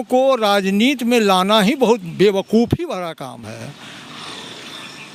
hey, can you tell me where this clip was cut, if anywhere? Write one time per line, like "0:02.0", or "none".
none